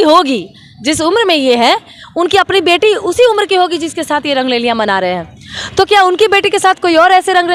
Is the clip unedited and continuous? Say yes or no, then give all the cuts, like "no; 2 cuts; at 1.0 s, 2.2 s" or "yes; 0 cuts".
yes; 0 cuts